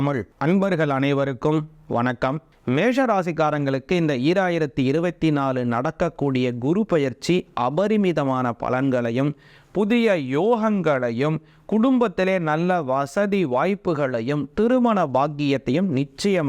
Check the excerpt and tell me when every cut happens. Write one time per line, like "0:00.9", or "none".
0:02.5